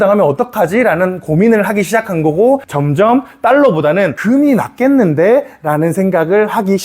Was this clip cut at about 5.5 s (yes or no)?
no